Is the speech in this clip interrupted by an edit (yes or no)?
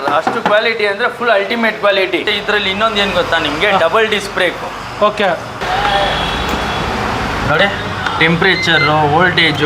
yes